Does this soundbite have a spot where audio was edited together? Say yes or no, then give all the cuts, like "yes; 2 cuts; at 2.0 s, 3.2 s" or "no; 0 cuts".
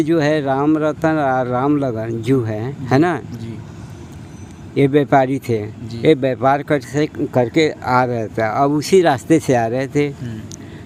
no; 0 cuts